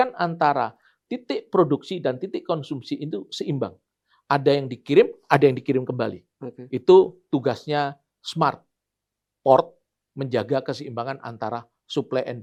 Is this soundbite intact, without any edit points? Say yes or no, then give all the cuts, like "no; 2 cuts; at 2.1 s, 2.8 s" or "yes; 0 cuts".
yes; 0 cuts